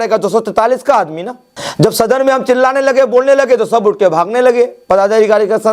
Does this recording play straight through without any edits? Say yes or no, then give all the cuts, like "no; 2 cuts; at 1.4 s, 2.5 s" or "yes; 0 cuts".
yes; 0 cuts